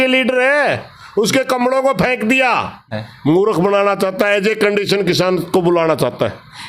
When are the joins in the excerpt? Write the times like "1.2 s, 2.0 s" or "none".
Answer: 2.9 s